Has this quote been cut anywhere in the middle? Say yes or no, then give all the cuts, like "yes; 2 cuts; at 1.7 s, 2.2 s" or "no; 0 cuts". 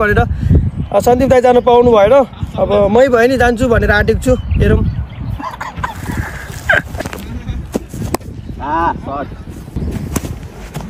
yes; 2 cuts; at 7.0 s, 9.8 s